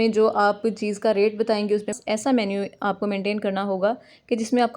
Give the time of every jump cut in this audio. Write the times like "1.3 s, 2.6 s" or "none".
2.0 s